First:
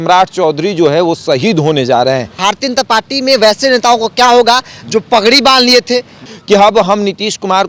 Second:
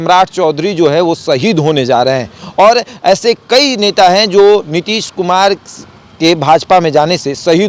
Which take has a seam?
first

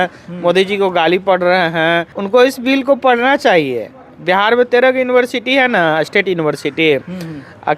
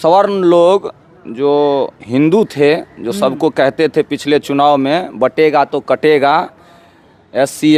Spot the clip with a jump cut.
first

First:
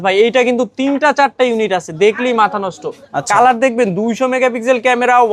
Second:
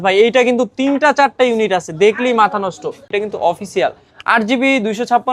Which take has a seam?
second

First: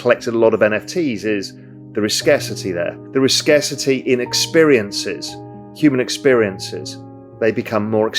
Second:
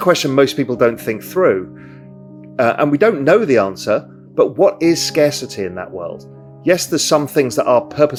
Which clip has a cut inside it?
first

